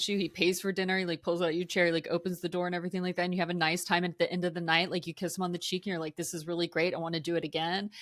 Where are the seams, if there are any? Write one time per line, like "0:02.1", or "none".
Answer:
none

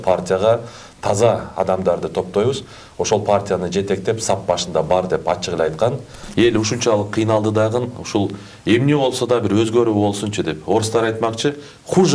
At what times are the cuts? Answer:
0:06.2

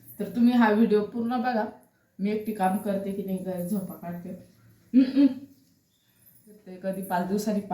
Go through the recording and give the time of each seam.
0:06.8

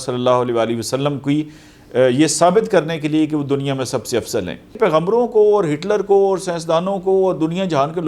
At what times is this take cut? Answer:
0:04.7

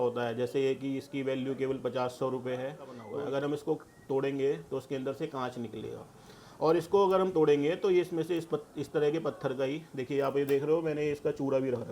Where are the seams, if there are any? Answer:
0:03.0

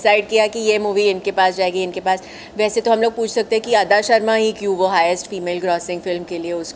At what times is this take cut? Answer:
none

